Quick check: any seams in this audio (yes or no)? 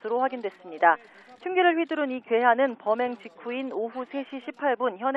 no